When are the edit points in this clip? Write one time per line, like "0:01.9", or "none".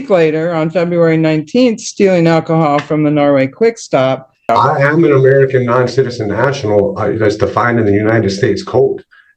0:04.5